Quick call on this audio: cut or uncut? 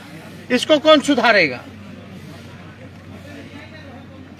uncut